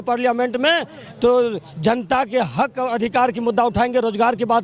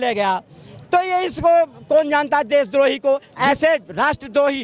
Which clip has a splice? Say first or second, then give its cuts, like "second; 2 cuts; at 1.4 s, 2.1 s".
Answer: second; 1 cut; at 3.3 s